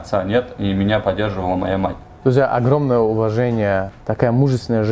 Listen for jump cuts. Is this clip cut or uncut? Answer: uncut